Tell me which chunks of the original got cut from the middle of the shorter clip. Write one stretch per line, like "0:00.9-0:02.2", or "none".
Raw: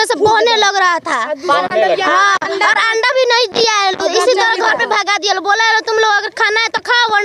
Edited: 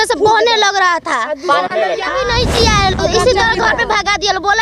0:02.1-0:03.1